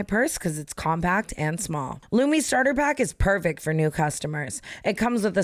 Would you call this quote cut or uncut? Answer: cut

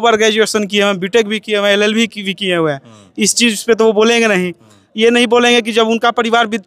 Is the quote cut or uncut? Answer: uncut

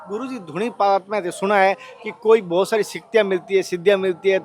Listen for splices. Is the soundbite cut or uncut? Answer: uncut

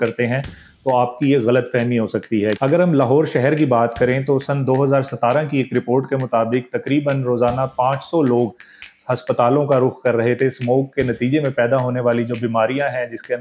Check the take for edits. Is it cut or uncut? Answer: cut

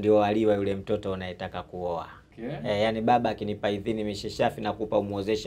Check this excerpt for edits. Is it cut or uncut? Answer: cut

